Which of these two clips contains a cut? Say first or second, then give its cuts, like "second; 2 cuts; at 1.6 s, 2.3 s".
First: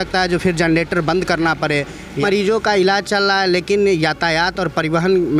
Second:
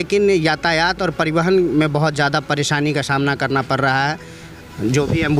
first; 1 cut; at 2.2 s